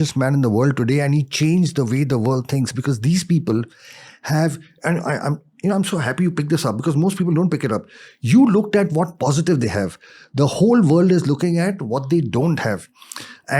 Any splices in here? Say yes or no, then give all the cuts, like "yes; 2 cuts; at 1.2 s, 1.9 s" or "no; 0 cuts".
no; 0 cuts